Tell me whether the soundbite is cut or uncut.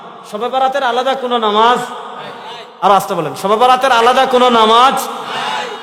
uncut